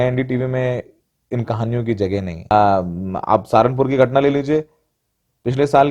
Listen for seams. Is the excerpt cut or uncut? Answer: cut